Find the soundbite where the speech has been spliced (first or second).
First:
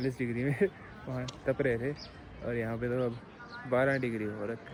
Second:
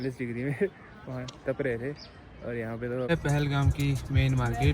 second